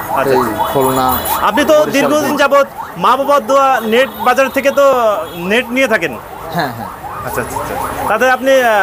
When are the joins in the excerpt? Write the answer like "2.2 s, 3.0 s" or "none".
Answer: 2.3 s